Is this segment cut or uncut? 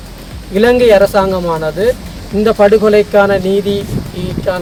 uncut